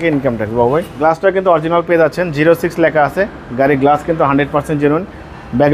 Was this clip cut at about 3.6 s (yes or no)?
no